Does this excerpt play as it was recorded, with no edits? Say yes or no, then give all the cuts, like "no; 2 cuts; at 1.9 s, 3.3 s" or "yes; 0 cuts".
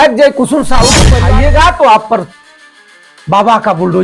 no; 1 cut; at 1.1 s